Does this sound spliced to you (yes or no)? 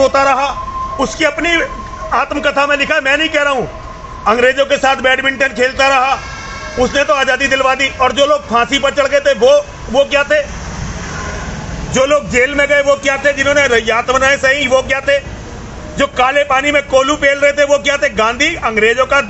yes